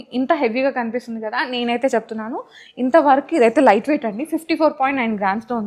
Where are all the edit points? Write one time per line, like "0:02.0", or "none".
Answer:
none